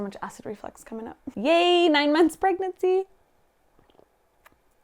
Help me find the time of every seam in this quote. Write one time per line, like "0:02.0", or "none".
0:01.3